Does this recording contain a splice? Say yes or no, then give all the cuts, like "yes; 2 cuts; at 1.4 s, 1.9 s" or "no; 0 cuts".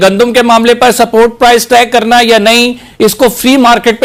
no; 0 cuts